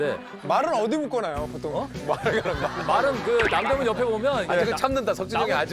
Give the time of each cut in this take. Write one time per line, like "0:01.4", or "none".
none